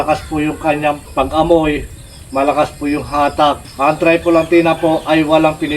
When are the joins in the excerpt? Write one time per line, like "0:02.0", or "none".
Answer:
0:01.0
0:03.7